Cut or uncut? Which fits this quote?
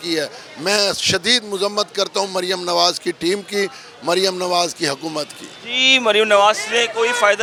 uncut